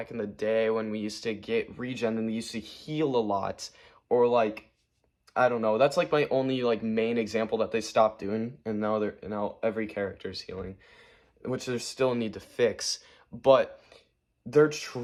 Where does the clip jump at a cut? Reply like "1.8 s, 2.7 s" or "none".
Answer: none